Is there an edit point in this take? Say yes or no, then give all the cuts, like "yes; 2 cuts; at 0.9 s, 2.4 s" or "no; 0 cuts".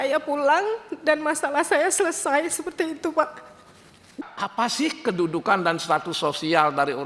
yes; 1 cut; at 4.3 s